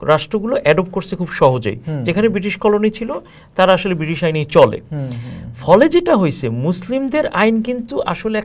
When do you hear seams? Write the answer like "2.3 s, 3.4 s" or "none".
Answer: none